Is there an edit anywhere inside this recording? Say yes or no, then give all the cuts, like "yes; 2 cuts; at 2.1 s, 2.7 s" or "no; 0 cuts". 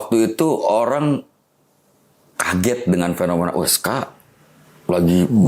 no; 0 cuts